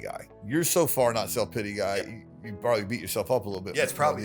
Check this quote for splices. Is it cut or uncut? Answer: uncut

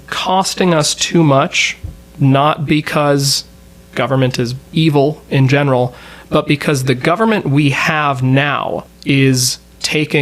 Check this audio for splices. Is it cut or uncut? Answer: cut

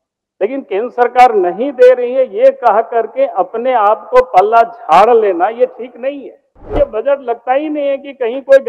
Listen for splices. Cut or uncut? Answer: cut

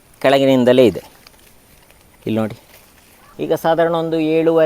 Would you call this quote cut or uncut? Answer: cut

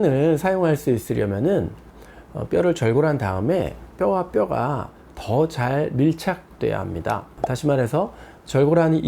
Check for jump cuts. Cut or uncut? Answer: uncut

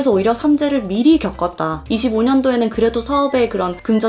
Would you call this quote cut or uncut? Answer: cut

